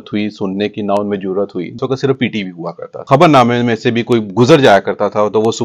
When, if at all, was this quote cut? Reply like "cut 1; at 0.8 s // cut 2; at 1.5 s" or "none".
cut 1; at 1.8 s // cut 2; at 3.0 s